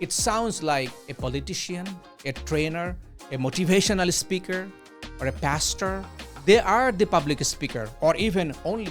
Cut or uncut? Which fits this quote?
cut